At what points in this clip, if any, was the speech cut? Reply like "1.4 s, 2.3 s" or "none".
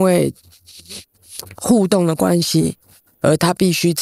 none